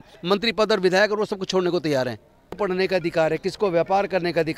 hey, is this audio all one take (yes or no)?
no